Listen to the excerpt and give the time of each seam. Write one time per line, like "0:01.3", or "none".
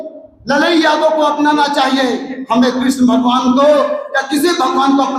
none